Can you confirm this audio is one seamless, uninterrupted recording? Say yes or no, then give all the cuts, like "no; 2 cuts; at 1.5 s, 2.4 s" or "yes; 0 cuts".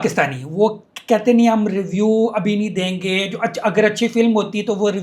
yes; 0 cuts